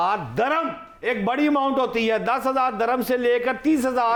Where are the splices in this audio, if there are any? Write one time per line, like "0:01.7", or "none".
none